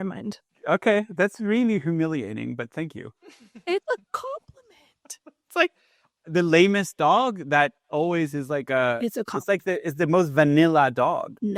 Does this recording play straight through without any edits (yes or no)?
yes